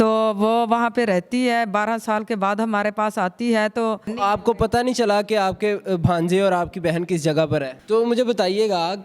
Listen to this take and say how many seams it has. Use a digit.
2